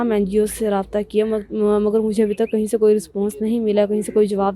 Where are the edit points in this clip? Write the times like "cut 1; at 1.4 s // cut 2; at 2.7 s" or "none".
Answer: none